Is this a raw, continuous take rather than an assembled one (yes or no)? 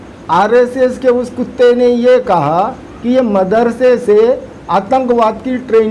yes